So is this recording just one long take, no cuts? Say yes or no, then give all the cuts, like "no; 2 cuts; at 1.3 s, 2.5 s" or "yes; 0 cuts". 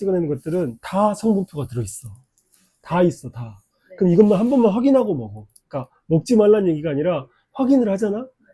yes; 0 cuts